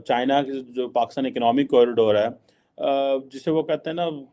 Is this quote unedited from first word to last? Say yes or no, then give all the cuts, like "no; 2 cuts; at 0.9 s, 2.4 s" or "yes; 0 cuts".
yes; 0 cuts